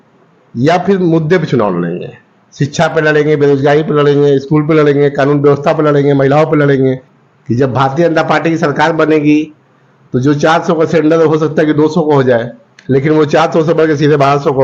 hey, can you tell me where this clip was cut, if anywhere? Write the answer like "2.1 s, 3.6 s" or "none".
none